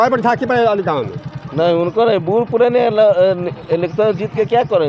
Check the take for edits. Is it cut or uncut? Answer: cut